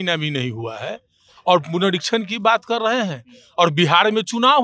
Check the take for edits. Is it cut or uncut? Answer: uncut